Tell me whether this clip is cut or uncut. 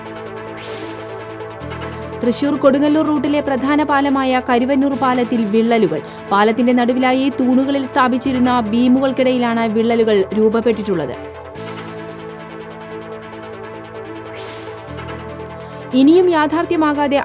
uncut